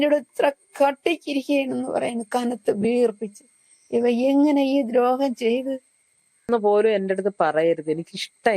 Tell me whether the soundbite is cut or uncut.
cut